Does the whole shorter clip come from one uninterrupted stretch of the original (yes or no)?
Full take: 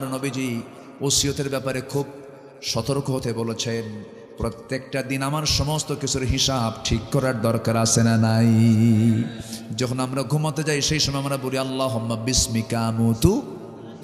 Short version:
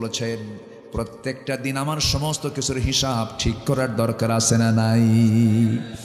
yes